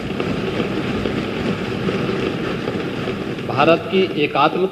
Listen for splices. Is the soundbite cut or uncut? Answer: uncut